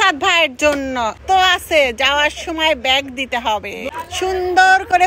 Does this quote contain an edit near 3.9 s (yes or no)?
yes